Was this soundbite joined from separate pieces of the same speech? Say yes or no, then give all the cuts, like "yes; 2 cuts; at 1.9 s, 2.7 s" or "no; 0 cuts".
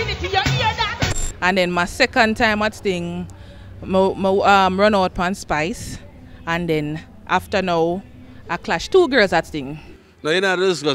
yes; 1 cut; at 1.1 s